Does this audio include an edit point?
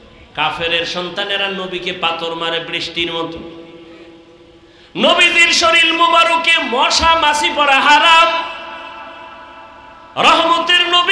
no; 0 cuts

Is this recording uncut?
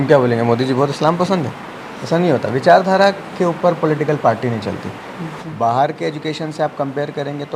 no; 1 cut; at 5.4 s

